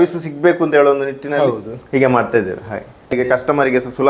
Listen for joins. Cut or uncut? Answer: cut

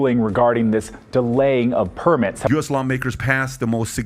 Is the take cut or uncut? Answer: cut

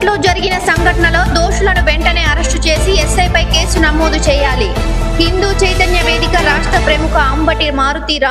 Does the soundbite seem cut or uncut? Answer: uncut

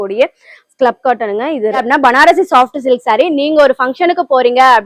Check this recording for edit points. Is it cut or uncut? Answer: cut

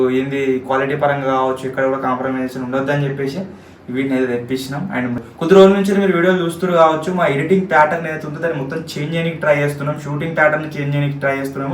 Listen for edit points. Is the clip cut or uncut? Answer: cut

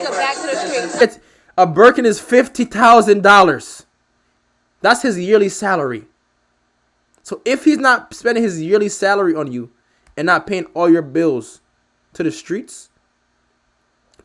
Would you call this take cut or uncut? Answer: cut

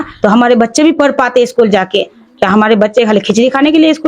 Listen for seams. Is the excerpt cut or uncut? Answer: uncut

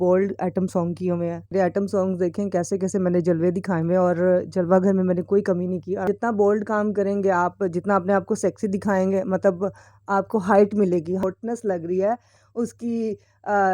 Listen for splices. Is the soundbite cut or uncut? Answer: cut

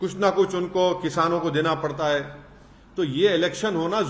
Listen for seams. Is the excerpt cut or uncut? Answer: uncut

